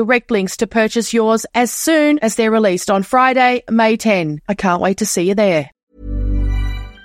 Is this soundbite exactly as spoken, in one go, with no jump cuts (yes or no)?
no